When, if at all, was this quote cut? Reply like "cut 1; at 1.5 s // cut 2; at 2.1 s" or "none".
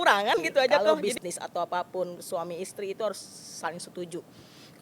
cut 1; at 1.1 s